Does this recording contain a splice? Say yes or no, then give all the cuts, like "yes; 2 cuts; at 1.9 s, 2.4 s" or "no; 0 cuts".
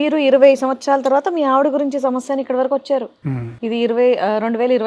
no; 0 cuts